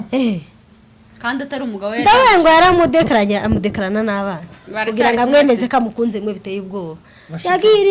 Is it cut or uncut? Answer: uncut